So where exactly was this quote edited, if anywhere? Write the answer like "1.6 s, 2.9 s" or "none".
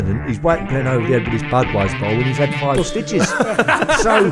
none